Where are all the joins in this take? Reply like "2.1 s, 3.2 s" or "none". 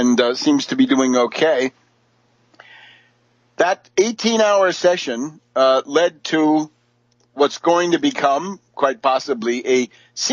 1.0 s